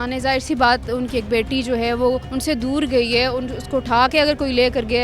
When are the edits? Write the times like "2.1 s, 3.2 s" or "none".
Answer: 2.3 s